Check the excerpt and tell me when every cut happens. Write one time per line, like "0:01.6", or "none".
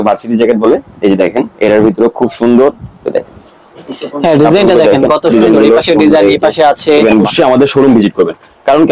0:07.3